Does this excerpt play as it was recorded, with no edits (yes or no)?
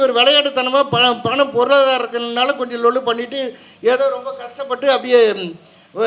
yes